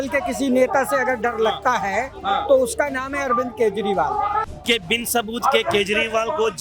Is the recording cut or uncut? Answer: cut